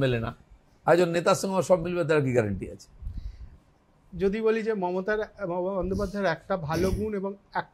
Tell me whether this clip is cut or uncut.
uncut